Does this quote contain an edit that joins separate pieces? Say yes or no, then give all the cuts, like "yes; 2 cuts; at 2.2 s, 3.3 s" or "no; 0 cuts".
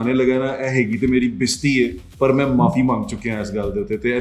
no; 0 cuts